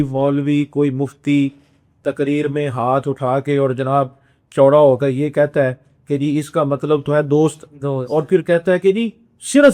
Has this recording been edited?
no; 0 cuts

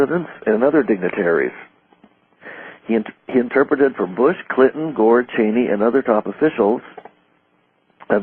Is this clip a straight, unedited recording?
no; 1 cut; at 6.6 s

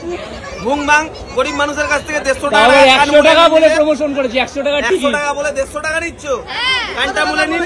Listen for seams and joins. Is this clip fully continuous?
yes; 0 cuts

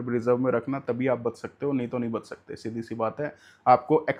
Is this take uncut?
yes; 0 cuts

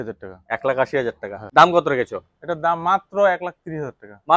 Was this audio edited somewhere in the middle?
yes; 1 cut; at 1.3 s

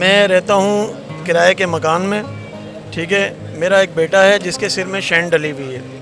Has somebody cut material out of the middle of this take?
no; 0 cuts

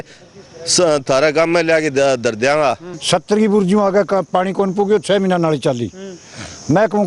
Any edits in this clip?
yes; 1 cut; at 2.9 s

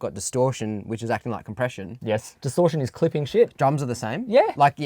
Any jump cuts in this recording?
yes; 1 cut; at 2.3 s

